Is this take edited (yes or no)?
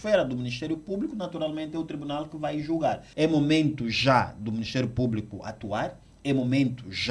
yes